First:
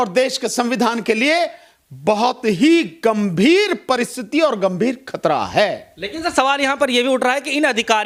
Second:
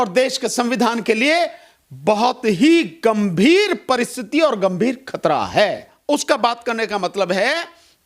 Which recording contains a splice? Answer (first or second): second